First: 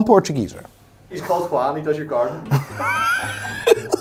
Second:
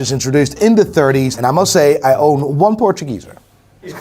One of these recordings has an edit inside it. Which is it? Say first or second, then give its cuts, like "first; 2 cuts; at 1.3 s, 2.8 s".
second; 1 cut; at 1.3 s